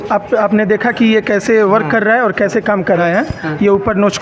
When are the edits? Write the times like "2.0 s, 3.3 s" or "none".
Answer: 3.0 s